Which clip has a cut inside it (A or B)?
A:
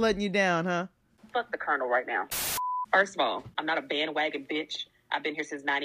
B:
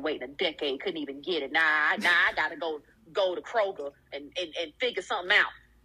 A